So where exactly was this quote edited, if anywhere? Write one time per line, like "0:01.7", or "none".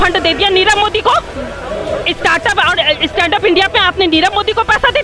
none